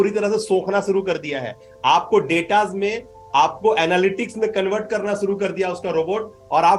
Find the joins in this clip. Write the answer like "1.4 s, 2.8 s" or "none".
none